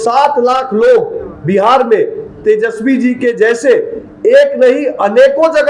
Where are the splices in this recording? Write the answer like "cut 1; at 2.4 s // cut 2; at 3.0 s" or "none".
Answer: none